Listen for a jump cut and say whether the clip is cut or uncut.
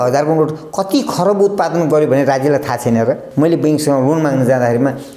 cut